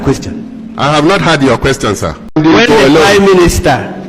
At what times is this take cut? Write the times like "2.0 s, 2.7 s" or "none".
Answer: 2.2 s

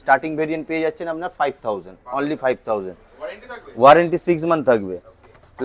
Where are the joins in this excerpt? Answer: none

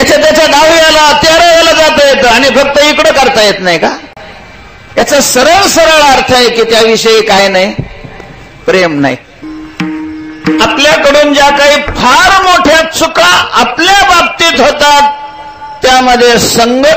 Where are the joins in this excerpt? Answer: 9.3 s

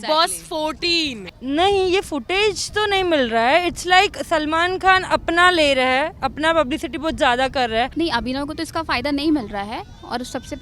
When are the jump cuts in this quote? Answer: 1.3 s, 7.9 s

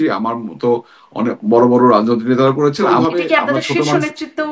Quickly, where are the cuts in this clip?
2.9 s

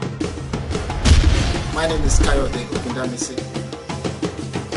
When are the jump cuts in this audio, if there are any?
none

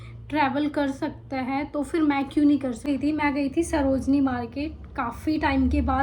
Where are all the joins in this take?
2.9 s

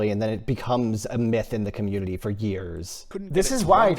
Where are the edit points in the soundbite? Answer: 3.0 s

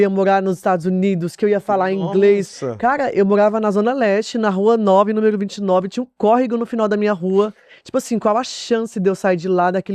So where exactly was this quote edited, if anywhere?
none

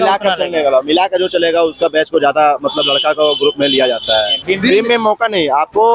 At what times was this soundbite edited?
4.4 s

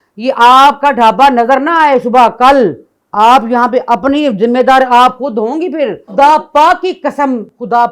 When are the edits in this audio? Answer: 6.0 s

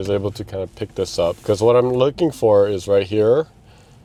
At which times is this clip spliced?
none

